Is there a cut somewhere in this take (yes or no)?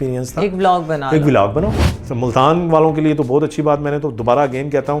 yes